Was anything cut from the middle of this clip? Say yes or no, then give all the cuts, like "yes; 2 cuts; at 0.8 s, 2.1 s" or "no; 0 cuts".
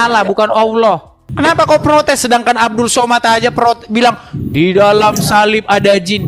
yes; 1 cut; at 1.3 s